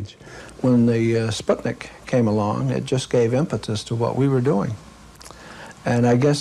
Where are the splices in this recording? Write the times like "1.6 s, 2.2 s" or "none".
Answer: 1.0 s